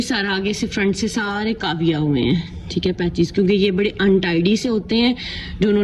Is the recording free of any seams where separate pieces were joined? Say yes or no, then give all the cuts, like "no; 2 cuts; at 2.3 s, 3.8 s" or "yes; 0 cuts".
yes; 0 cuts